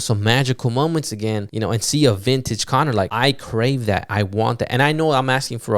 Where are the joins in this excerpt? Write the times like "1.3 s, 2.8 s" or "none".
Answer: 1.5 s, 3.1 s